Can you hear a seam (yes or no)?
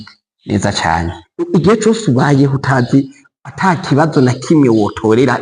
yes